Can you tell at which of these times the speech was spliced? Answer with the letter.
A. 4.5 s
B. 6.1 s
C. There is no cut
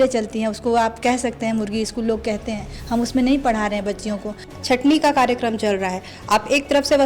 A